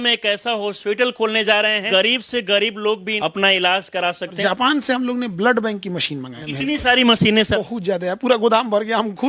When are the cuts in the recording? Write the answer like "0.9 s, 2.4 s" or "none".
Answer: 1.8 s, 3.1 s, 4.4 s, 6.4 s, 7.6 s